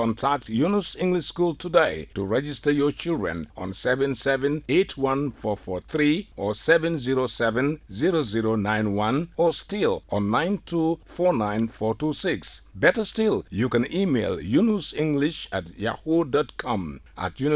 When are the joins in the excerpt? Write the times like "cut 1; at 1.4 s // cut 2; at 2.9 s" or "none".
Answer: none